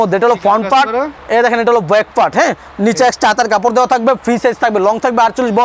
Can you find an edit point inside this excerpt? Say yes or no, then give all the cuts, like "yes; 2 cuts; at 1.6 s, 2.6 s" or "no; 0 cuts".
no; 0 cuts